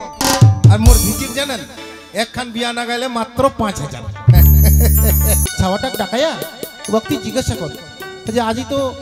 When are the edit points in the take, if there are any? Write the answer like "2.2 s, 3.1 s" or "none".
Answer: 5.5 s